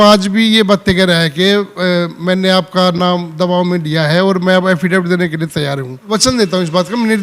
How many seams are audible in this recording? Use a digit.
1